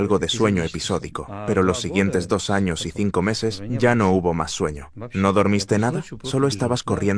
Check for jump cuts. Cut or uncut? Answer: uncut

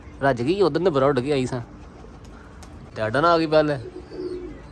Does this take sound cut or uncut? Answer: cut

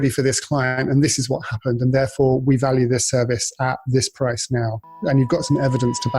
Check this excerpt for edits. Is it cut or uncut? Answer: uncut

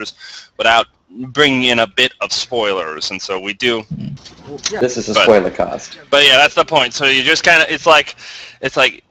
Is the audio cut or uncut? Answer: uncut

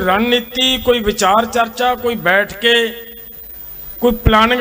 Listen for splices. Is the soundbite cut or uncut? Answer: uncut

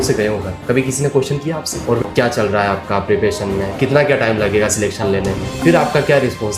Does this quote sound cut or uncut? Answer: cut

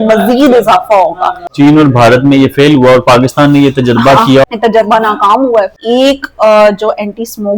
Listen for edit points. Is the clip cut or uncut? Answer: cut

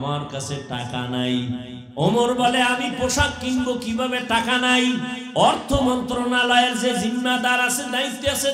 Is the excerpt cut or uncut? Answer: cut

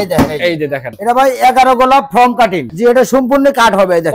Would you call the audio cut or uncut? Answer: cut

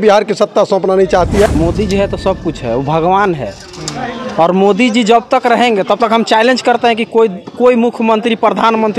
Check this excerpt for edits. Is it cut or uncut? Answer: cut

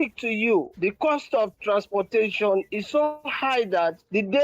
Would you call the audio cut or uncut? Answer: uncut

